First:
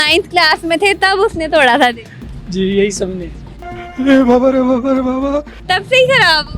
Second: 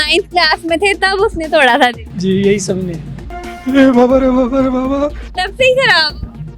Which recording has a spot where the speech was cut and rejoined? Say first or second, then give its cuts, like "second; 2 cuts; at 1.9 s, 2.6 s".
second; 1 cut; at 2.1 s